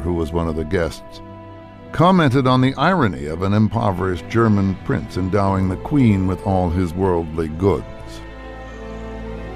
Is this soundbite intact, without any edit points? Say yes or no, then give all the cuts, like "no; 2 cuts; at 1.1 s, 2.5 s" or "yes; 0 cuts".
yes; 0 cuts